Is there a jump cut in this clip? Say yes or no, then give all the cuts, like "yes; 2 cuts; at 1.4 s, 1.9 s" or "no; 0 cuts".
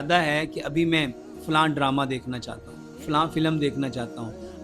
no; 0 cuts